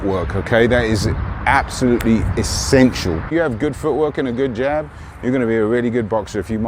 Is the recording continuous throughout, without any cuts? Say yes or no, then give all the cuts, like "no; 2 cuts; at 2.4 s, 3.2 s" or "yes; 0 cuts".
no; 1 cut; at 3.2 s